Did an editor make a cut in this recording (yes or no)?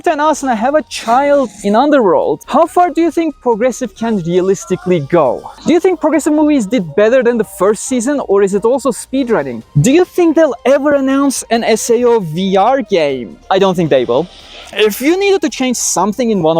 yes